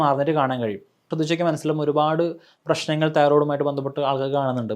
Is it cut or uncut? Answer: cut